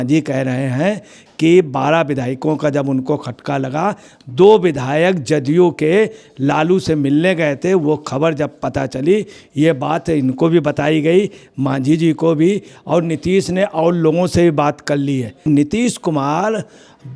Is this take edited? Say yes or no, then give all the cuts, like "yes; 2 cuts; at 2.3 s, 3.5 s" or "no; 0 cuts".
yes; 1 cut; at 15.5 s